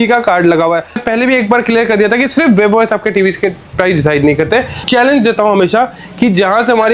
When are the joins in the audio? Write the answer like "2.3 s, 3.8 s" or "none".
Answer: 1.0 s, 4.8 s

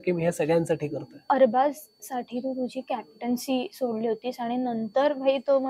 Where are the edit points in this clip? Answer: 1.2 s

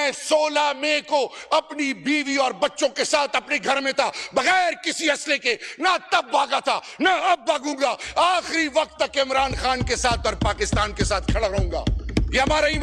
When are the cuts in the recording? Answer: none

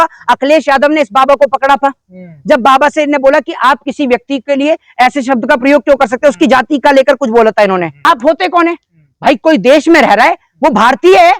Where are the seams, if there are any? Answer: none

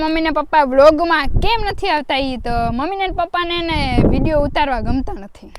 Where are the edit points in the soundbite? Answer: none

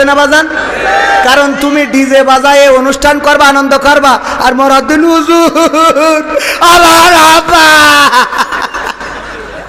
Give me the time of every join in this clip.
none

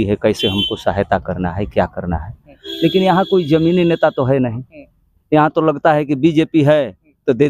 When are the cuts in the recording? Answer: none

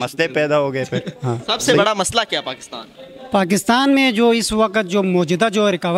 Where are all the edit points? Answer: 1.6 s

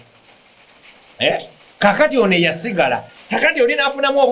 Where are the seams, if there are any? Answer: 3.1 s

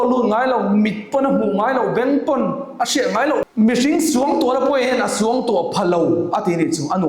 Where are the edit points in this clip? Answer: 3.4 s

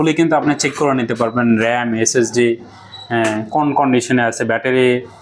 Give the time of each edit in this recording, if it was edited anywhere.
none

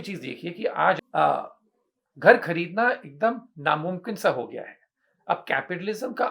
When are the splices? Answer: 1.0 s

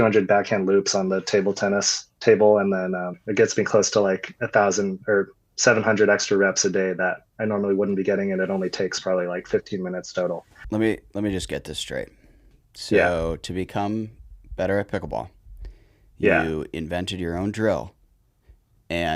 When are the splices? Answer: 3.2 s, 10.6 s

